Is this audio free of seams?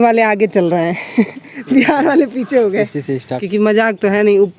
no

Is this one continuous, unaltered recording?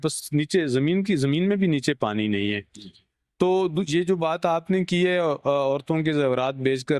yes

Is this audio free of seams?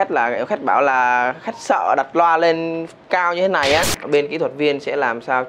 no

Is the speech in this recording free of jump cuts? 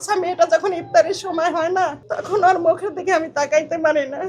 no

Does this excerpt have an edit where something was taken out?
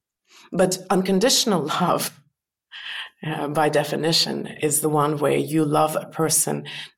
no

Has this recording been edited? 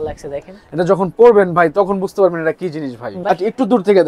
yes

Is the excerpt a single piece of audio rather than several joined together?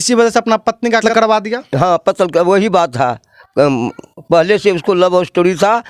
no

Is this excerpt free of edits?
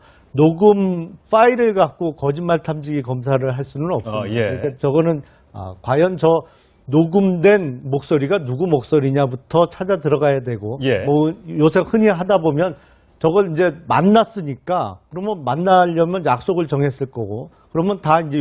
no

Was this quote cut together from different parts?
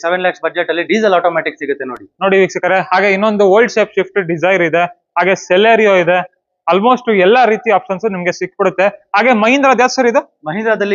no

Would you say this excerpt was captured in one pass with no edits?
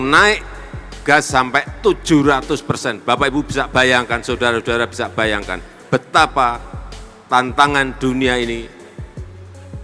no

